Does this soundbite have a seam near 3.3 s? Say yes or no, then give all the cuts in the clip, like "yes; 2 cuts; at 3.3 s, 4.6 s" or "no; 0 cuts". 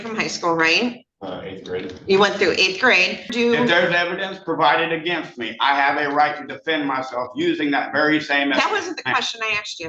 yes; 1 cut; at 3.3 s